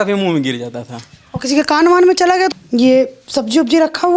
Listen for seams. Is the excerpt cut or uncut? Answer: cut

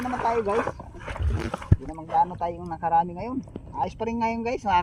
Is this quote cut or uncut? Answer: uncut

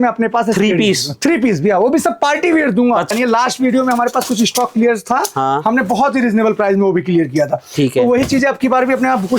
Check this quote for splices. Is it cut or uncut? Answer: cut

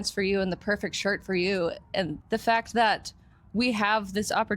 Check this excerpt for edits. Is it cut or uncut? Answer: cut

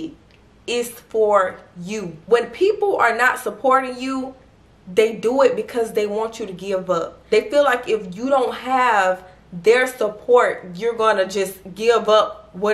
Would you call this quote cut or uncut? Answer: uncut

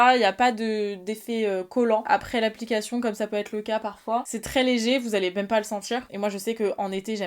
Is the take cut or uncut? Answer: uncut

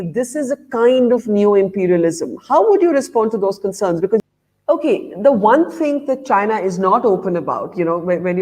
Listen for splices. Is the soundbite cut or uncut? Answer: cut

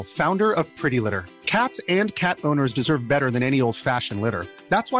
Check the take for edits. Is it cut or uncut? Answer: uncut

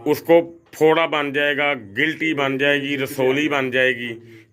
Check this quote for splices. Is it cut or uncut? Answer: uncut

